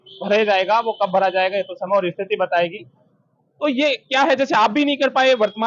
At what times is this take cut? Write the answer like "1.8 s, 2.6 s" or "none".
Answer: none

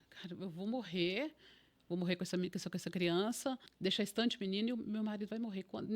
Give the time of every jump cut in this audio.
3.7 s

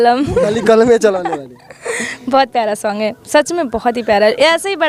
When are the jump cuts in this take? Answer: none

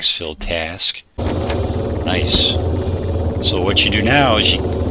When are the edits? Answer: 1.2 s

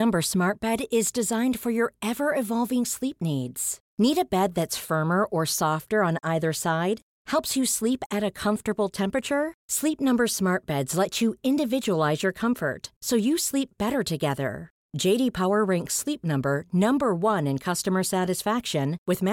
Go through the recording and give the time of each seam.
none

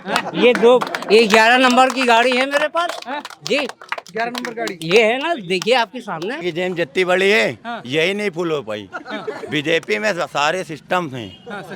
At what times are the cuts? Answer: 6.4 s

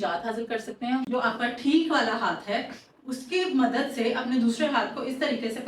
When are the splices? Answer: 1.1 s

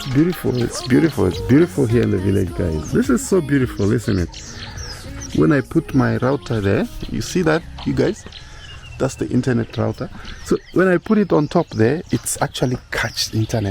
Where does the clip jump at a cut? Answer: 2.8 s, 5.1 s

